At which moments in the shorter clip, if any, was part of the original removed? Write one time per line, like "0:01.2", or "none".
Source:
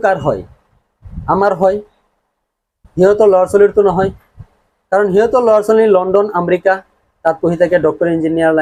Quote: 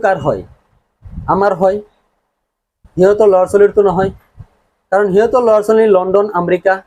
none